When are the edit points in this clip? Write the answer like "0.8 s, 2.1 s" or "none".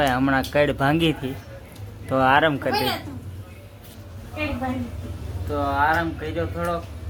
none